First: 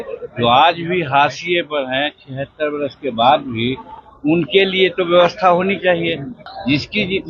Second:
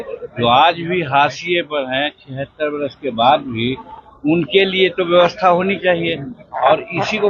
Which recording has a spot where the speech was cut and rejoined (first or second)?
first